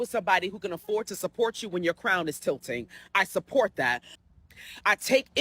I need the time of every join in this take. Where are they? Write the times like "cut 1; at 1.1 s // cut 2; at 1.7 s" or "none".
cut 1; at 4.1 s

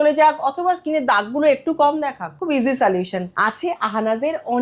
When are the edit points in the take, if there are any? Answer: cut 1; at 2.3 s // cut 2; at 3.3 s

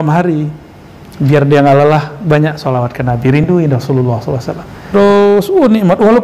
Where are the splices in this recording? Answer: cut 1; at 4.9 s

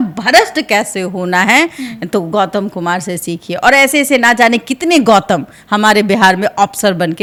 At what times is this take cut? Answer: none

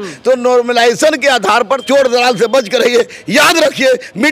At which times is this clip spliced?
cut 1; at 1.8 s

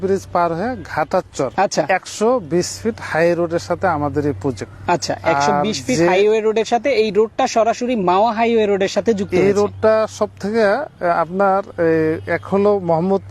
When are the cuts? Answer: cut 1; at 1.5 s // cut 2; at 4.7 s

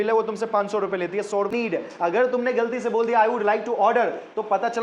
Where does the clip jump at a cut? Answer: cut 1; at 1.5 s

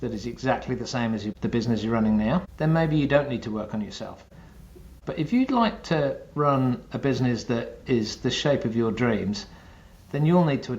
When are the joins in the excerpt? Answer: cut 1; at 1.3 s // cut 2; at 2.5 s // cut 3; at 4.5 s

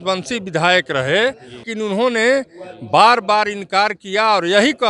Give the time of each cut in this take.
cut 1; at 1.7 s

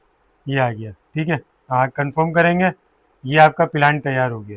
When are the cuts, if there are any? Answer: cut 1; at 1.5 s

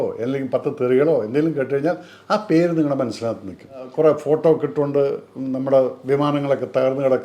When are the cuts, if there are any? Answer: cut 1; at 3.9 s

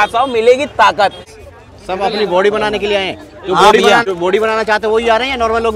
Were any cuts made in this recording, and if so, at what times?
cut 1; at 1.3 s // cut 2; at 4.0 s

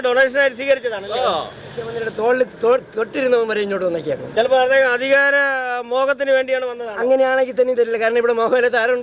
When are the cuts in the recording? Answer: cut 1; at 1.9 s

